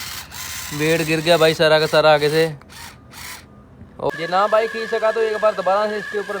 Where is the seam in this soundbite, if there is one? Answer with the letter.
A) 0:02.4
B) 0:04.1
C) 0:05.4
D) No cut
B